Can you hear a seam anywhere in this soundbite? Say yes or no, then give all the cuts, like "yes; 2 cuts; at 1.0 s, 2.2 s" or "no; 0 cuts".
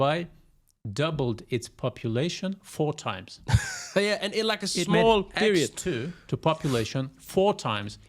no; 0 cuts